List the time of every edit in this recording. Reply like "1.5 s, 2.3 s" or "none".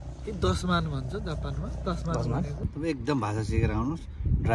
2.7 s